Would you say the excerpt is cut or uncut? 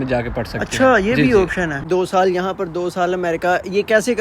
cut